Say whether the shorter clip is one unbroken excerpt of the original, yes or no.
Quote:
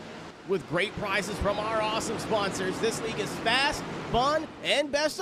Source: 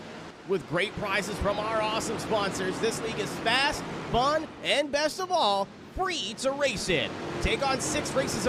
yes